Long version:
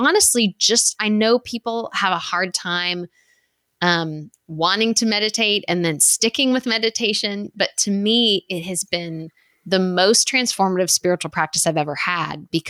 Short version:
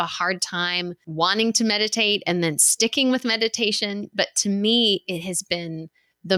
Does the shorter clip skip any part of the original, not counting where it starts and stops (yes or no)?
yes